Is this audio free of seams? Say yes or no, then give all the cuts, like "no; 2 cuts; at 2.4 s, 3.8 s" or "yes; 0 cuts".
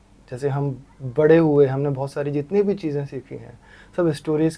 yes; 0 cuts